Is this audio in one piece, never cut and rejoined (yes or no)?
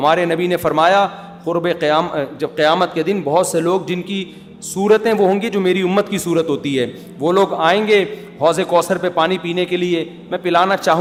yes